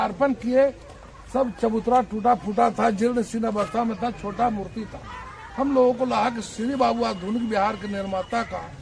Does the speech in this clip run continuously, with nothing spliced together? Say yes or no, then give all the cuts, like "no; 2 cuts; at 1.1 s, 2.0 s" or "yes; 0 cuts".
yes; 0 cuts